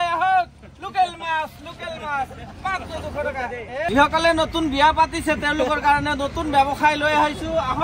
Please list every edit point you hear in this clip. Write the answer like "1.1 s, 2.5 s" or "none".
3.9 s